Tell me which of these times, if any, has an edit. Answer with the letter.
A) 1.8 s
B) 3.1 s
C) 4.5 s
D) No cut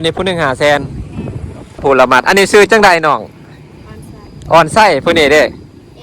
A